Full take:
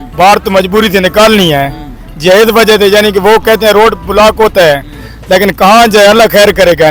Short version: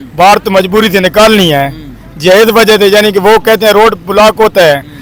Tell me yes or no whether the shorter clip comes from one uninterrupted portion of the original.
yes